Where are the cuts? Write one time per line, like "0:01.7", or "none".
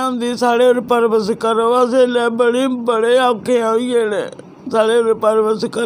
none